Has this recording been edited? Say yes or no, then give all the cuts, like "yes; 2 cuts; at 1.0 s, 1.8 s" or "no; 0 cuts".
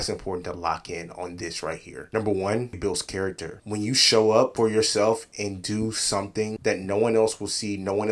no; 0 cuts